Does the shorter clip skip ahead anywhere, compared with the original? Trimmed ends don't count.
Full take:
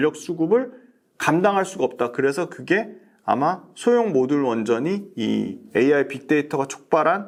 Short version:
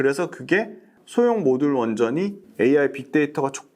yes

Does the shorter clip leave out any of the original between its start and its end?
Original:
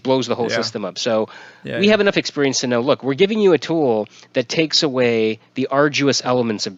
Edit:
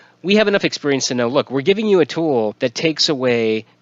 yes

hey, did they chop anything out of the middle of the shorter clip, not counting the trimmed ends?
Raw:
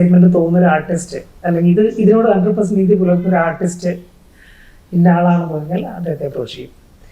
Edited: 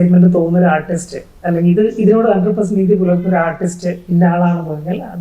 yes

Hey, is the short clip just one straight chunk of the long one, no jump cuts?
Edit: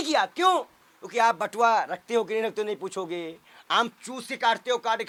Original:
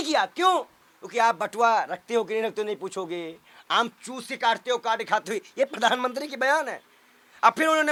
yes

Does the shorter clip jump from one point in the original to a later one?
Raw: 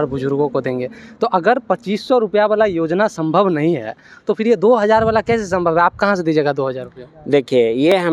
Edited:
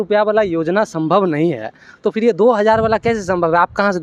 no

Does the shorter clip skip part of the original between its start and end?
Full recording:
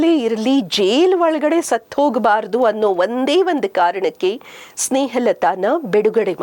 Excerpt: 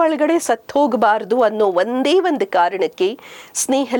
no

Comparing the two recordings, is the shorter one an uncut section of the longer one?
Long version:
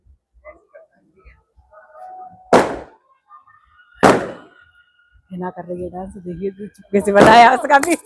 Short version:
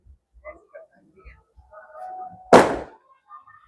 yes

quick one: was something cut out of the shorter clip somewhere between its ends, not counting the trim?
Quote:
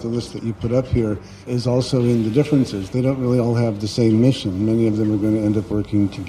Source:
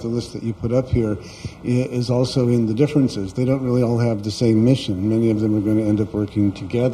yes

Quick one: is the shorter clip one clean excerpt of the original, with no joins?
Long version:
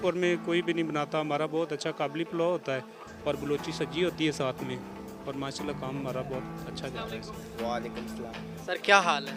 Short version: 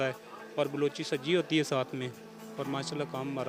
yes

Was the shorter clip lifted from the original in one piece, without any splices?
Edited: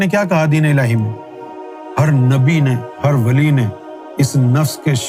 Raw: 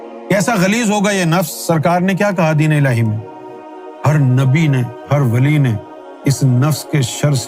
yes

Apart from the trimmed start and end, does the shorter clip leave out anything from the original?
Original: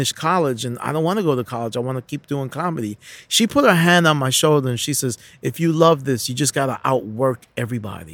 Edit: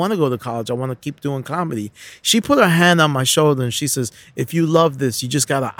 no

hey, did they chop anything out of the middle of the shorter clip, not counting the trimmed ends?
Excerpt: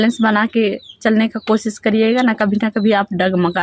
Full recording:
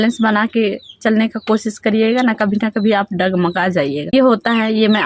no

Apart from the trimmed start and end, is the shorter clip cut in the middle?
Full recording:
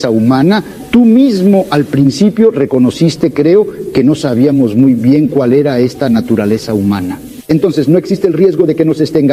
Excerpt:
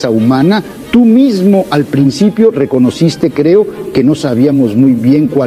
no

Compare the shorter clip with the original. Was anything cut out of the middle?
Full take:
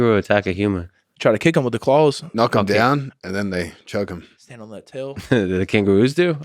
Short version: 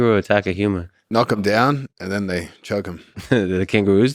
yes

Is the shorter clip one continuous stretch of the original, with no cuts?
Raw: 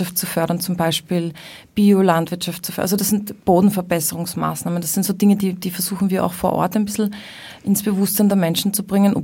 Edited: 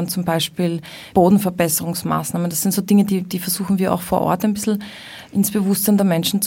no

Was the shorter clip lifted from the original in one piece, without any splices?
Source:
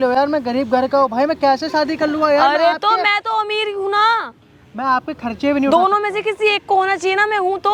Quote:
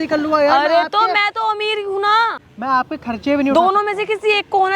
no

